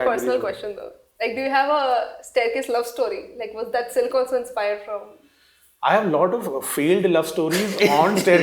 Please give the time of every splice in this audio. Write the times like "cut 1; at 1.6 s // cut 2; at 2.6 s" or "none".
none